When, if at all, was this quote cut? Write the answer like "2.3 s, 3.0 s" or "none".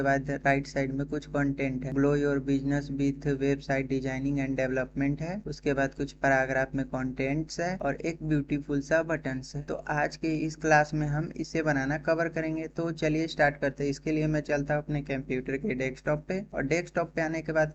none